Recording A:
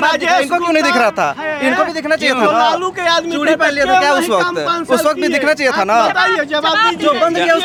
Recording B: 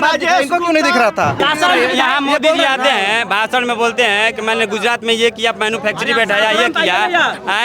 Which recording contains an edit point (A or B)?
B